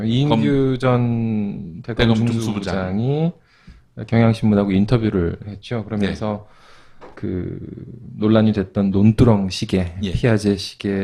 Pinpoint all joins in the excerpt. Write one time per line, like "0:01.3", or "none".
0:02.6